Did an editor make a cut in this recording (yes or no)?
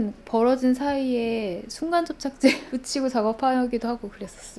no